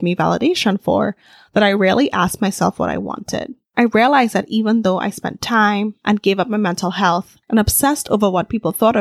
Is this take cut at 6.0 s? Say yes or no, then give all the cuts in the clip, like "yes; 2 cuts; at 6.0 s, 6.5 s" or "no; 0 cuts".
no; 1 cut; at 7.3 s